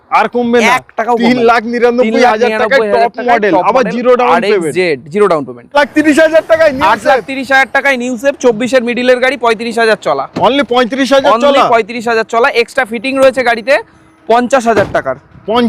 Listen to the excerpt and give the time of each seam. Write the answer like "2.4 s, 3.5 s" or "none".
5.7 s